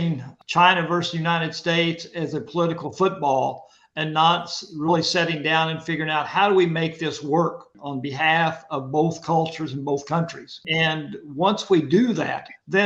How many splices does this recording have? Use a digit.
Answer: 1